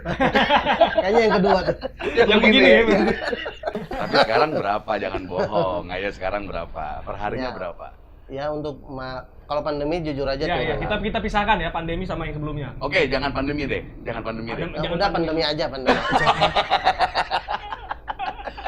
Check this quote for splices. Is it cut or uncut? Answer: cut